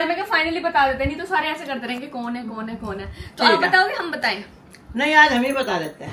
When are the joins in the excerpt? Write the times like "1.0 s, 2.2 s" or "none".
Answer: none

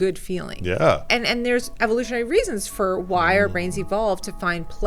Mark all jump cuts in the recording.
1.1 s

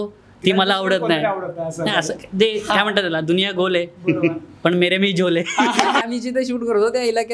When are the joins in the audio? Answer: 6.0 s

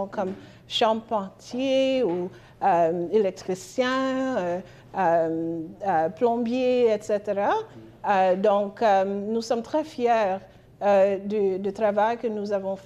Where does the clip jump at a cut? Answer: none

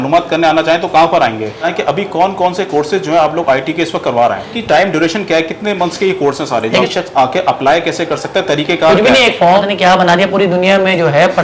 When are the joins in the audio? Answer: 1.6 s, 4.6 s, 6.8 s, 9.6 s

